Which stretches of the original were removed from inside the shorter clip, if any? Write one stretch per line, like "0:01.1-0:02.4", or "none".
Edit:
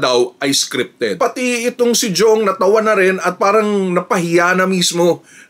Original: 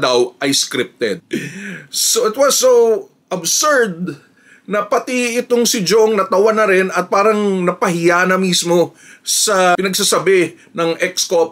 0:01.2-0:04.9